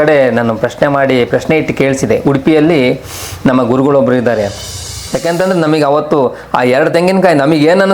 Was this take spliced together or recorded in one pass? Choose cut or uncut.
cut